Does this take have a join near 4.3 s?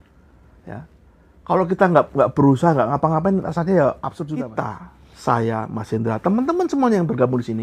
yes; 1 cut; at 4.3 s

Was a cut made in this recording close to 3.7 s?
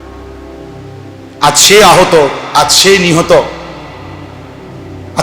no; 1 cut; at 1.4 s

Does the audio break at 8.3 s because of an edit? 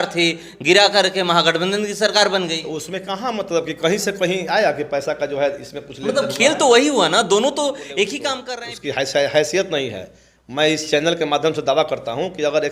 yes; 1 cut; at 8.3 s

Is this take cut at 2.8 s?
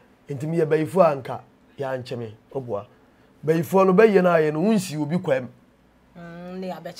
no; 0 cuts

